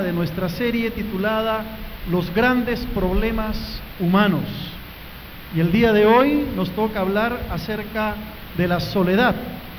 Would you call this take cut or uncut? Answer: uncut